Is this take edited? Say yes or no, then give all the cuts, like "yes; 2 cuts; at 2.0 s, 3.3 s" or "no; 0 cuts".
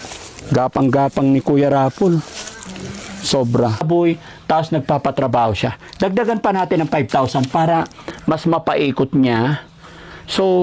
yes; 1 cut; at 3.9 s